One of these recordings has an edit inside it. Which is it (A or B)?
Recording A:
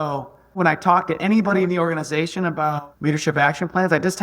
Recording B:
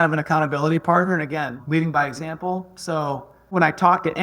A